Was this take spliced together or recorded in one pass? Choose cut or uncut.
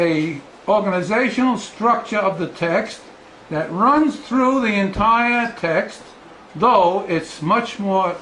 cut